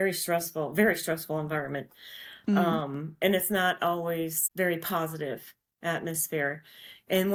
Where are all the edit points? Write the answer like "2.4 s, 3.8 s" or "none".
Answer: none